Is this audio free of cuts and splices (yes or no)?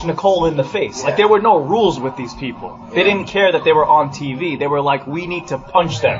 yes